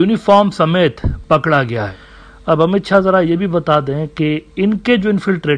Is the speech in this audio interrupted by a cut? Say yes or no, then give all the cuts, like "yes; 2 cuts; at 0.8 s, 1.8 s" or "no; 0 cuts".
yes; 1 cut; at 2.0 s